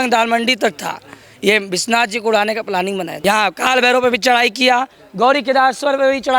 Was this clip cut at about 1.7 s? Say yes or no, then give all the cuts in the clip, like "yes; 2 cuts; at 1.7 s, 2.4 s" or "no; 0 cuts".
no; 1 cut; at 3.1 s